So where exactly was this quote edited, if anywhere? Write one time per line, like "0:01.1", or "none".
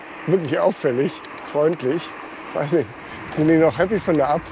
none